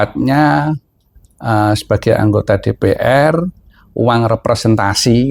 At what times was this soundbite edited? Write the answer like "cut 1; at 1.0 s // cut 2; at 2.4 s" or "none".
none